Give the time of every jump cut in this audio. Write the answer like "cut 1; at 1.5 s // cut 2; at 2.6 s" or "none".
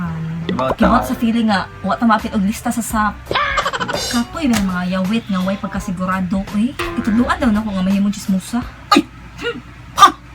cut 1; at 4.0 s